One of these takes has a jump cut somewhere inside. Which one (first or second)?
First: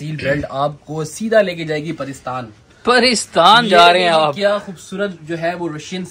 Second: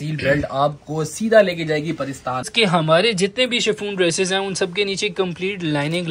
second